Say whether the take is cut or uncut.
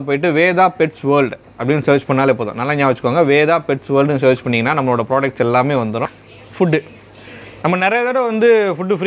cut